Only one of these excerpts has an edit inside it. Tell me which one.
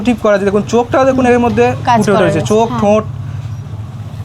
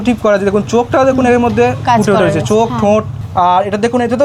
second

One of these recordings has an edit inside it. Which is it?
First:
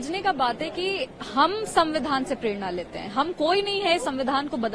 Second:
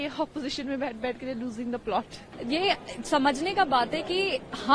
second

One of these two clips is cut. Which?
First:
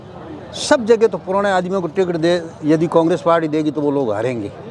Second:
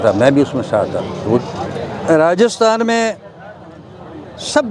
second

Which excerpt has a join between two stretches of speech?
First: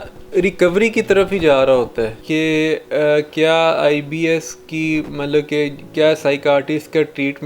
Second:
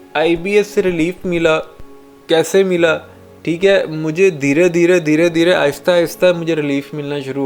first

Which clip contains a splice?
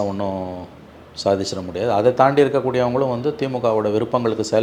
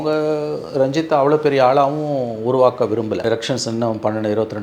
second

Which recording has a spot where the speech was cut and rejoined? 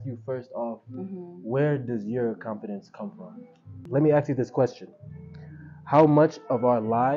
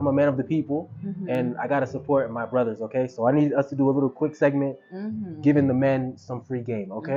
first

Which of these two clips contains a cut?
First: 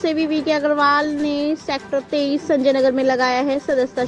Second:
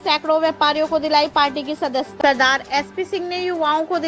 second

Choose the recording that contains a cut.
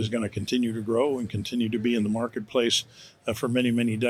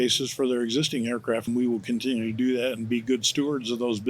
second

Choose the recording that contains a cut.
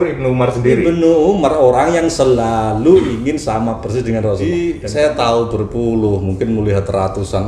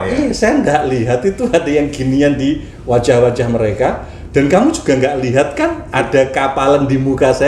first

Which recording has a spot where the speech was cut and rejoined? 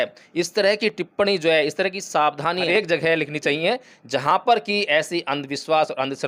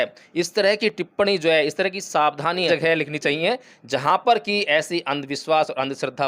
second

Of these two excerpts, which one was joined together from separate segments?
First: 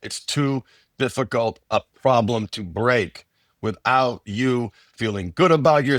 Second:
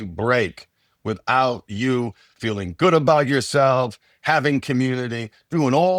first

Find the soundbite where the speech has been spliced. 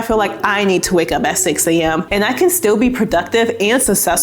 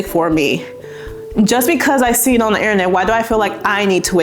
first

